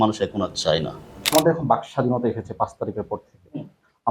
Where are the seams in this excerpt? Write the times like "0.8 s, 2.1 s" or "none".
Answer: 1.3 s

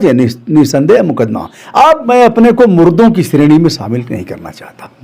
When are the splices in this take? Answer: 2.1 s

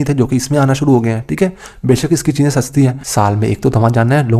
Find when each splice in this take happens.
3.0 s

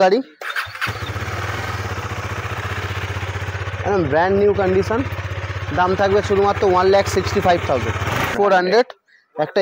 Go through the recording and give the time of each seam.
8.3 s

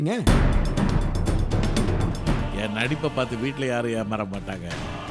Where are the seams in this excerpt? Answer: 2.4 s

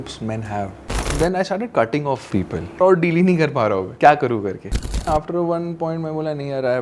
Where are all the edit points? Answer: 1.1 s, 2.8 s, 3.9 s, 5.1 s

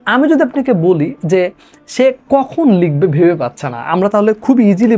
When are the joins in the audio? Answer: none

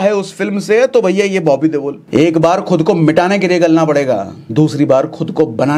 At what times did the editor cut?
2.0 s, 4.4 s

